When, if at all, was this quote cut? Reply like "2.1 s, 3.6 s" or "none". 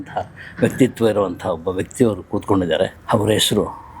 3.0 s